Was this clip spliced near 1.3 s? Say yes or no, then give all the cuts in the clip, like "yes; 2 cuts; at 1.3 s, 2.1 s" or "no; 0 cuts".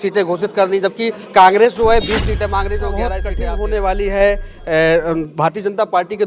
no; 1 cut; at 3.2 s